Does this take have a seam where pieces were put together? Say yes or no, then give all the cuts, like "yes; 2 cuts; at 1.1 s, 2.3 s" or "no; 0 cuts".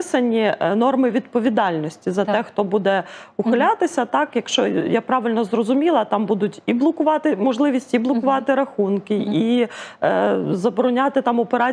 no; 0 cuts